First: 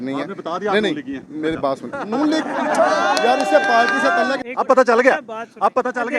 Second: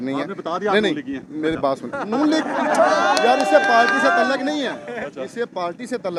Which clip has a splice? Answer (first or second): first